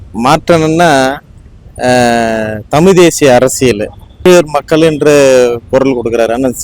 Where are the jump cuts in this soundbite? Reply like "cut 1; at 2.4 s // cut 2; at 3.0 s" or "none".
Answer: cut 1; at 4.3 s